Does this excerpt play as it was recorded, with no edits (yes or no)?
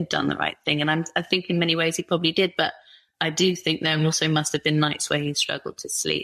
yes